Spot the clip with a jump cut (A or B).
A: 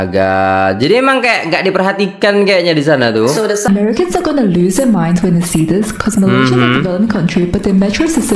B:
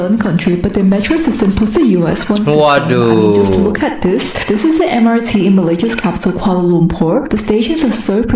A